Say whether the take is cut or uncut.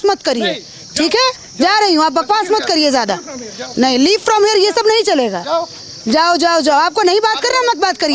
uncut